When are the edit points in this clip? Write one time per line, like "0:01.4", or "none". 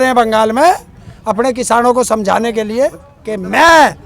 0:03.0